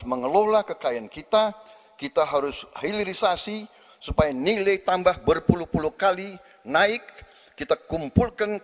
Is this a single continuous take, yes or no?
yes